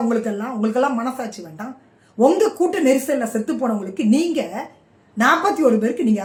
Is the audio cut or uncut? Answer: uncut